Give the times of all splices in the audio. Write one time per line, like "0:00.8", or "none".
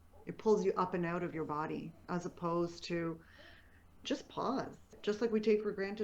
0:04.9